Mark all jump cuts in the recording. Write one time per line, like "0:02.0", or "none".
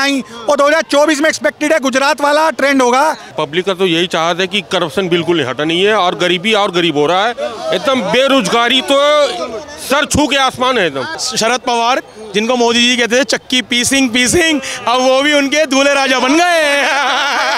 0:03.3
0:11.2